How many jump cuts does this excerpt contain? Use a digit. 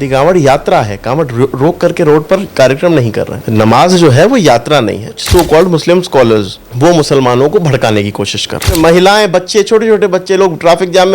4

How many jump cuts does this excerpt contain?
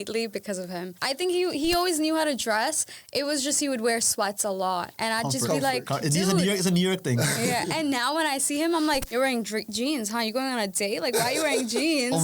3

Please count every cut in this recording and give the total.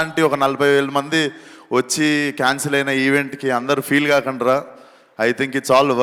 0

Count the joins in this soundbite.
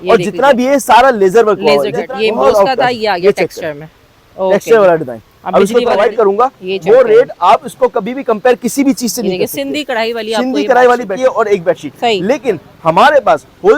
3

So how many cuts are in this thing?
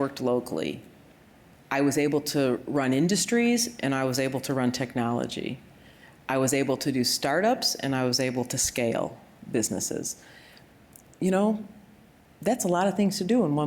0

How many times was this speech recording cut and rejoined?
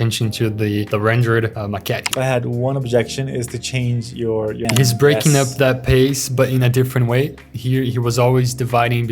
2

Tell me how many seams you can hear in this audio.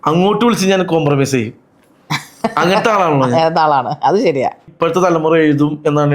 1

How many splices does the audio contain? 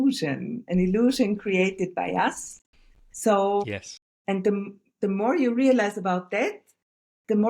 0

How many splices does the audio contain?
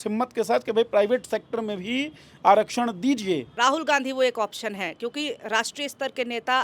1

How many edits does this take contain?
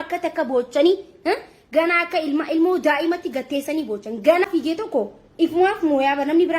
1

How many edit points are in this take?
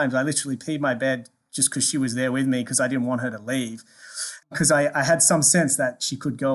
1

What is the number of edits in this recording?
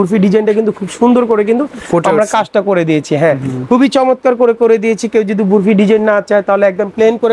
0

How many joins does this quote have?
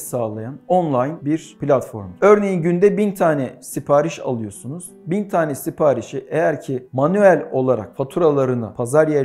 0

